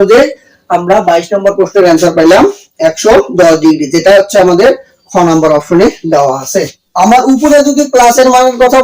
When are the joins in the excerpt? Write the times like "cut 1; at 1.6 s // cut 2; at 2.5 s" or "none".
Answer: cut 1; at 6.8 s